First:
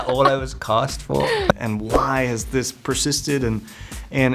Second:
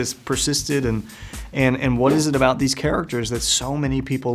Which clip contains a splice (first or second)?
first